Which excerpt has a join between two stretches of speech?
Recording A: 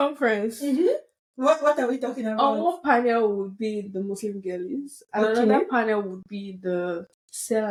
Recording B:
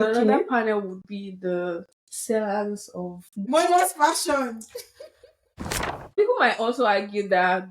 B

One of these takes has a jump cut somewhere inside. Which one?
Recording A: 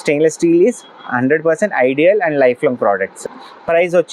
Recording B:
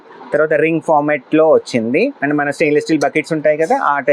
A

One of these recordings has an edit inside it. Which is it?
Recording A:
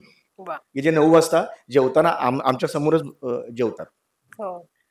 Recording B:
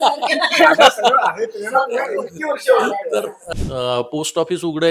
B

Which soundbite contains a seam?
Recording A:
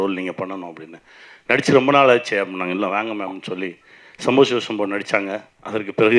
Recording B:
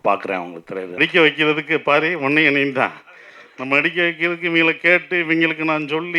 B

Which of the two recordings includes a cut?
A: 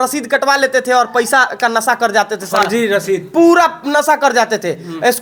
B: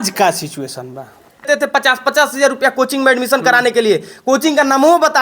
B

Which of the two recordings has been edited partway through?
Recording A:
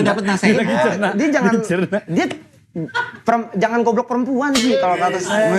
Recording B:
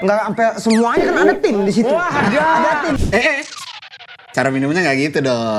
B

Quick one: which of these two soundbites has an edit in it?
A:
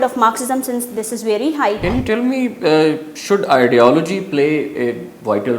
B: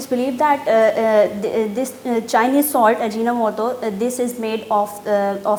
A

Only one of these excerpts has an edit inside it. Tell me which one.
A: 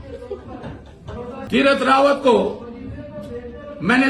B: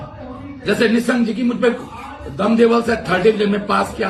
A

